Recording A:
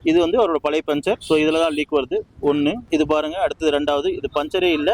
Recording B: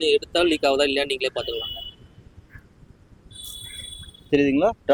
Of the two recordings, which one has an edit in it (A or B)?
A